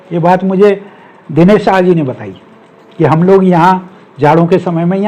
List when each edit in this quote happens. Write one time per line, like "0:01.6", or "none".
none